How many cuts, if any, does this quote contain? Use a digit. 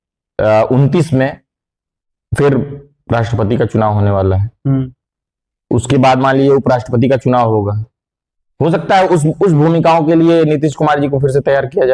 0